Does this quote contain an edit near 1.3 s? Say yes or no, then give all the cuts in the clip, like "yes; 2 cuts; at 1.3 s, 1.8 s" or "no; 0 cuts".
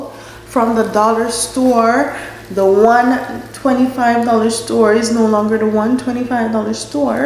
no; 0 cuts